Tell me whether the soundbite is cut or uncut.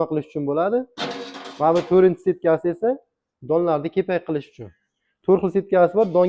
uncut